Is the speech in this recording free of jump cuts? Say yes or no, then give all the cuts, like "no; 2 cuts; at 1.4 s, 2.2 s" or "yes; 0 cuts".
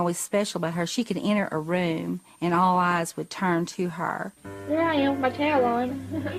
yes; 0 cuts